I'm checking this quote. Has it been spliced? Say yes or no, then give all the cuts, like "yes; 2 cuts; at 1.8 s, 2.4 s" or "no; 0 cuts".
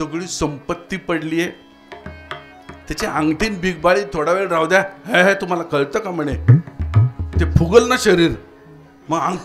no; 0 cuts